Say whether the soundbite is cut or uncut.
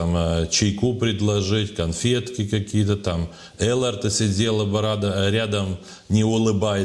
uncut